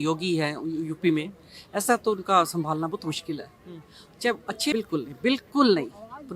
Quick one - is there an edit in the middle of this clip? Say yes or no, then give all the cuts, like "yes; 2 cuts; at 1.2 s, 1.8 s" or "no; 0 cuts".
yes; 1 cut; at 4.7 s